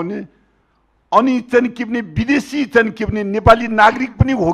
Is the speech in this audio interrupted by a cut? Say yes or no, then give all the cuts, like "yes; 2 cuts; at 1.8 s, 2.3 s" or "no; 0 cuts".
no; 0 cuts